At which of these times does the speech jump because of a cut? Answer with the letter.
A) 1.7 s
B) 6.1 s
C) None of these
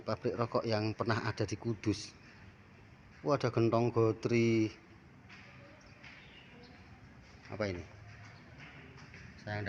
C